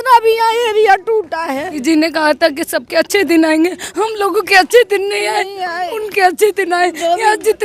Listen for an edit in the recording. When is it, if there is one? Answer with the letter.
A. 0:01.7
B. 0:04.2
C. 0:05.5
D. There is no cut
A